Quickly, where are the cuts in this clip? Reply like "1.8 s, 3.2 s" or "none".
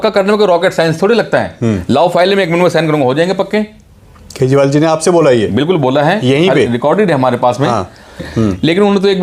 8.3 s